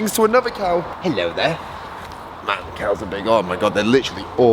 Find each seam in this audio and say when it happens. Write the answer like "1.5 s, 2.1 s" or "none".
0.9 s